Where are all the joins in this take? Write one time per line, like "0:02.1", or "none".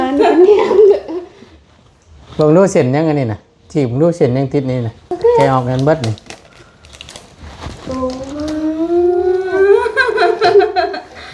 0:05.1